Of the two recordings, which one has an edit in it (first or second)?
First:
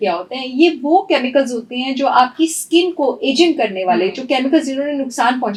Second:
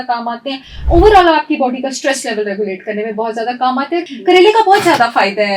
second